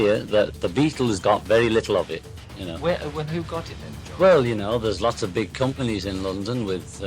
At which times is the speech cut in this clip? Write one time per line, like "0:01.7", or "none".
0:02.5